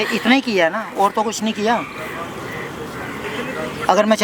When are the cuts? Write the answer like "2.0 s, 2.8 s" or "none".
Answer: none